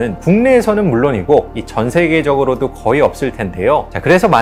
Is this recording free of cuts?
yes; 0 cuts

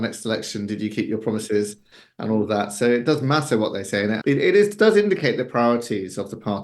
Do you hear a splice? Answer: yes; 1 cut; at 4.2 s

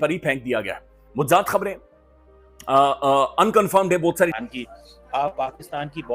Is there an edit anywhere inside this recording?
yes; 1 cut; at 4.3 s

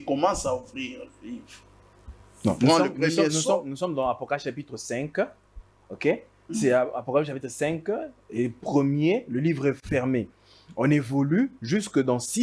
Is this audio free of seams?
yes; 0 cuts

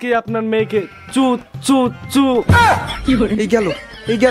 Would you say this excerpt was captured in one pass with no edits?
yes; 0 cuts

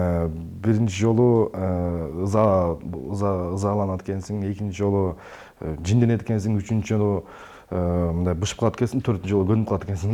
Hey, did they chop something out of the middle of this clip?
no; 0 cuts

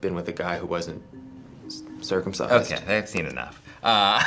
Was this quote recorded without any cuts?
yes; 0 cuts

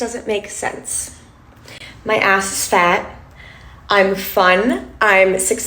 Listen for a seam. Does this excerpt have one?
yes; 1 cut; at 3.2 s

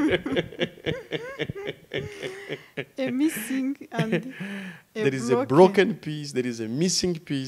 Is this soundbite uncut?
yes; 0 cuts

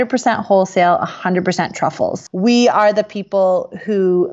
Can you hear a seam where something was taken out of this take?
yes; 1 cut; at 2.3 s

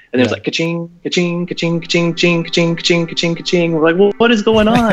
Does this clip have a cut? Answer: no; 0 cuts

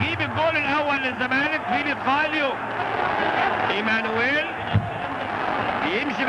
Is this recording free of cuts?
yes; 0 cuts

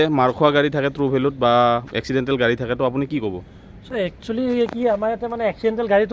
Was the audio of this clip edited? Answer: no; 0 cuts

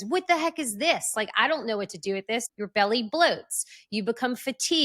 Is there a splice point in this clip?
yes; 1 cut; at 2.5 s

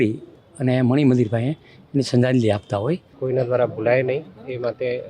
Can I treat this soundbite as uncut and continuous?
no; 1 cut; at 3.1 s

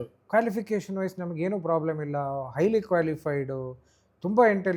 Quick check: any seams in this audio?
no; 0 cuts

